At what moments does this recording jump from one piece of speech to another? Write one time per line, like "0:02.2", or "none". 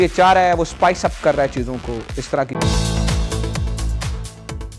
0:02.5